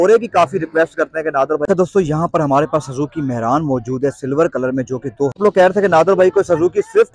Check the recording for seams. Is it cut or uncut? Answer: cut